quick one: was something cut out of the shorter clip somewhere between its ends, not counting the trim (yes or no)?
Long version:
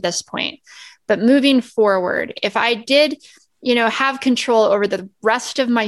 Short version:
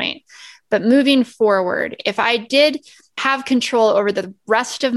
yes